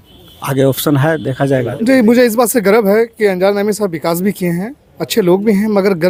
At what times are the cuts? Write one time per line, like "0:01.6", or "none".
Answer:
none